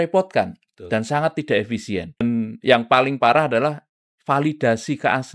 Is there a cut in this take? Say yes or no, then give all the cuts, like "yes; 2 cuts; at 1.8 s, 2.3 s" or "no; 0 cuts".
yes; 1 cut; at 2.2 s